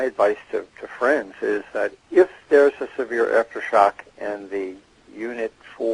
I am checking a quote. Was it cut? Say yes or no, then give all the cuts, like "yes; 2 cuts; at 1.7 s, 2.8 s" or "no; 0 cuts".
yes; 1 cut; at 2.1 s